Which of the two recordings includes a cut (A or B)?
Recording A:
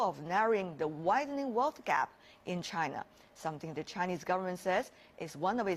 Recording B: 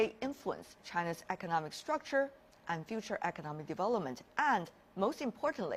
B